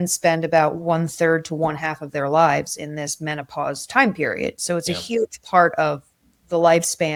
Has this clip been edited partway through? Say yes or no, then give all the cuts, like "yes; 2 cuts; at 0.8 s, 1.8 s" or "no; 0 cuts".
no; 0 cuts